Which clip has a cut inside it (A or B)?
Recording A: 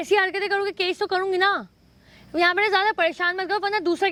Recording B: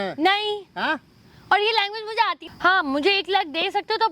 B